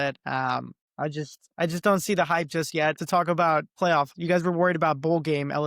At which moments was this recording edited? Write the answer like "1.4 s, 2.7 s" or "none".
3.0 s, 3.8 s